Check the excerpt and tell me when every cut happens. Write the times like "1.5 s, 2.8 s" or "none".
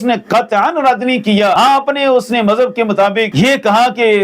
1.6 s, 3.3 s